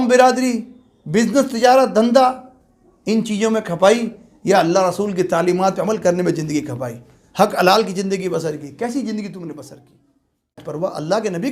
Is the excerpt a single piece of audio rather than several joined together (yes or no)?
no